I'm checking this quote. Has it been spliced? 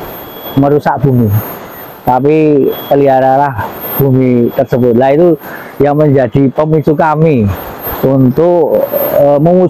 no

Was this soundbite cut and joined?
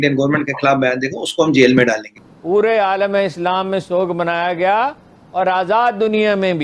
yes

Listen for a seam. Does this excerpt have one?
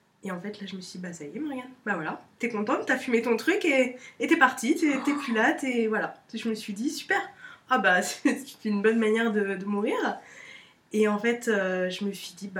no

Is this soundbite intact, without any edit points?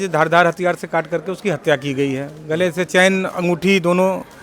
yes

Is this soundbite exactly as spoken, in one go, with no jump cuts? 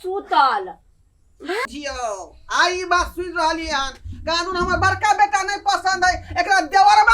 no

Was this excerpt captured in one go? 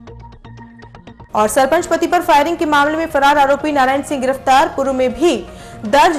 no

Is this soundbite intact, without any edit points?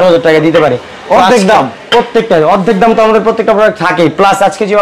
yes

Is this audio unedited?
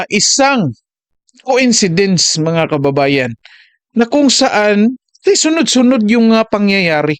yes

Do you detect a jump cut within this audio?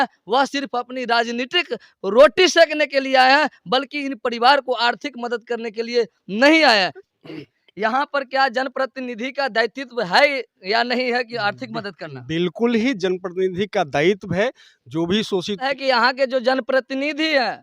yes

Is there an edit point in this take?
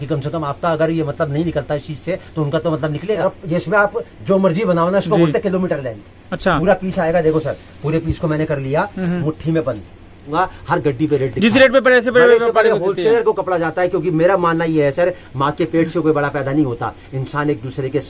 yes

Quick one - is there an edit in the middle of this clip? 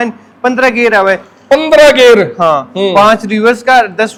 no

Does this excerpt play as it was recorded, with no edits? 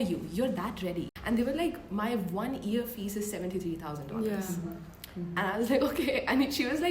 no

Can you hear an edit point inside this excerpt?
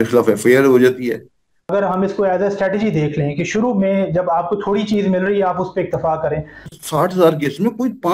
yes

